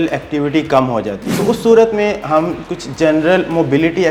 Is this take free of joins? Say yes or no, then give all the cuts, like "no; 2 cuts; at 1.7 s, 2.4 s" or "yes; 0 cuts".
no; 1 cut; at 1.3 s